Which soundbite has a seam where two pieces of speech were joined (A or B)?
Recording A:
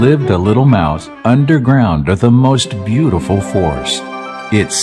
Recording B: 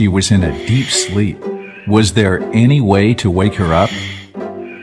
B